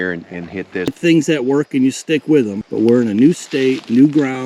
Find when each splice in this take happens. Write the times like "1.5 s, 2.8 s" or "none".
0.9 s, 2.6 s